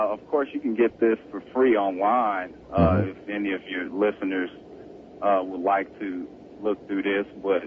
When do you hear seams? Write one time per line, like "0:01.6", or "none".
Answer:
0:03.9